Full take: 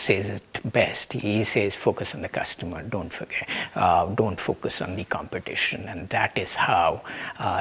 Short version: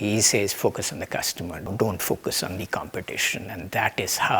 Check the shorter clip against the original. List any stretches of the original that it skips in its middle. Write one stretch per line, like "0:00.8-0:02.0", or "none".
0:02.9-0:04.1